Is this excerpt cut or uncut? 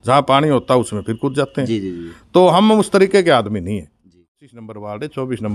cut